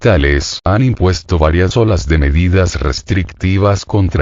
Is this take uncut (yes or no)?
no